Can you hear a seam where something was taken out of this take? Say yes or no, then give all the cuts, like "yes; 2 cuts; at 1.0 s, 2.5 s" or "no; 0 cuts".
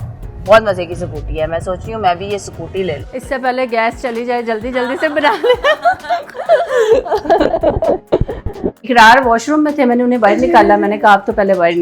yes; 2 cuts; at 3.0 s, 8.8 s